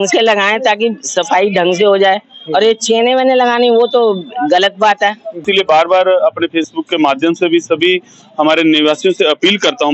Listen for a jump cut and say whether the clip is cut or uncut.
cut